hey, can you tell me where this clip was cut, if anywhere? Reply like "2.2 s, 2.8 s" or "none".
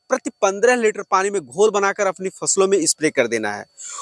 none